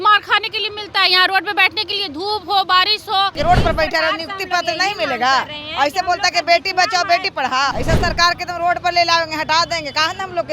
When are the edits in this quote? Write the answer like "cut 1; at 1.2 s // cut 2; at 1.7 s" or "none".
cut 1; at 3.4 s // cut 2; at 7.8 s